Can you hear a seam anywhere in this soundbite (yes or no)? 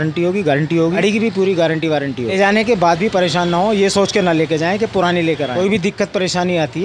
yes